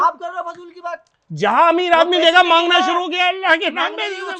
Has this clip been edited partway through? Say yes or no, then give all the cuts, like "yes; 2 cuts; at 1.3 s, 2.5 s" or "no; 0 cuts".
no; 0 cuts